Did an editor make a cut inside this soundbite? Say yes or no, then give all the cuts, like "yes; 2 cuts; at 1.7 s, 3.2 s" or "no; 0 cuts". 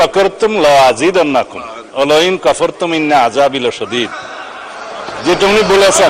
no; 0 cuts